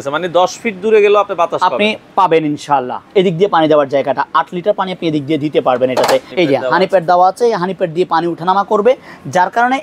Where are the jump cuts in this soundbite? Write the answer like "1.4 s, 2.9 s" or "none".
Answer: 3.0 s, 6.3 s